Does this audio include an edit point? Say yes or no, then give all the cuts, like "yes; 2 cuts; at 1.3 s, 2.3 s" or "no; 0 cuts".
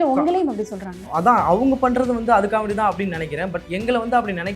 yes; 1 cut; at 1.1 s